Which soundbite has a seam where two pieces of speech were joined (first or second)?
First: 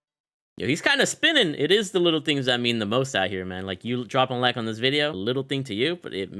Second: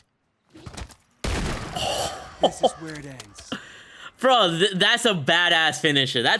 first